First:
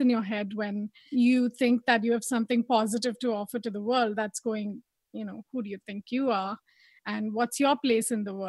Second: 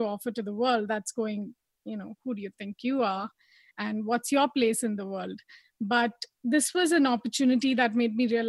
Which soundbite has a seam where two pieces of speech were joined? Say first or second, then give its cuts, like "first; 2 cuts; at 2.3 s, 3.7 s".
first; 1 cut; at 1.0 s